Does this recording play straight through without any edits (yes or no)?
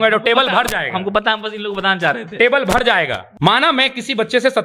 no